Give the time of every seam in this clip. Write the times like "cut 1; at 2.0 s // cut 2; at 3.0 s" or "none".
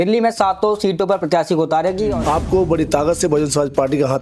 cut 1; at 2.2 s